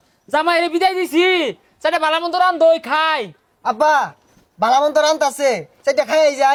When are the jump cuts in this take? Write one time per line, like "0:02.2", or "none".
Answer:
none